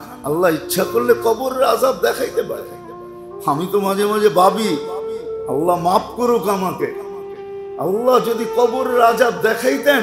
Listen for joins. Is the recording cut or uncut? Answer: uncut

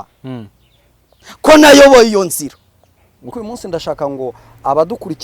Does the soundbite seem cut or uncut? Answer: cut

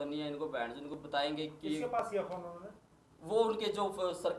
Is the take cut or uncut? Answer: uncut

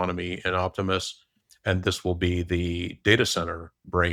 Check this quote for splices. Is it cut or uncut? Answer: uncut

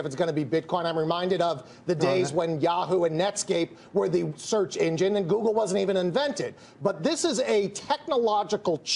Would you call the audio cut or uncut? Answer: cut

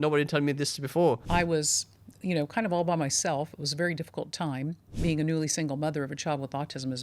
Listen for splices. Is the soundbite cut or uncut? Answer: cut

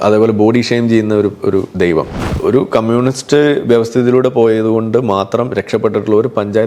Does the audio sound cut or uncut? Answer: cut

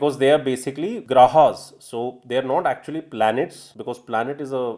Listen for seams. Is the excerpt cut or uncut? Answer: cut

